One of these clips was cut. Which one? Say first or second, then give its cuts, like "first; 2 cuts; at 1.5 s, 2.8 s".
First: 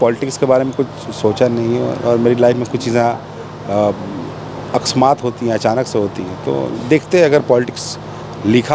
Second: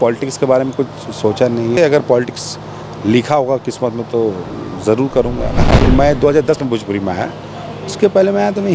second; 2 cuts; at 1.8 s, 5.7 s